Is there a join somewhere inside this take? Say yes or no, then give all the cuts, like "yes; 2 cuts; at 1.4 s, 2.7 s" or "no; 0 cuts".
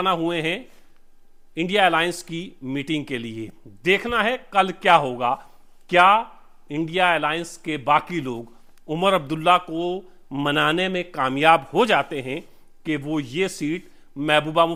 no; 0 cuts